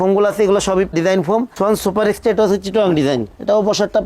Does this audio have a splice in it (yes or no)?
yes